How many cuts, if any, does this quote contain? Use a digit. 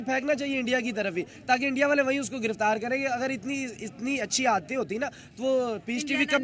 0